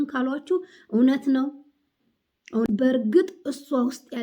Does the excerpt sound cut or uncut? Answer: cut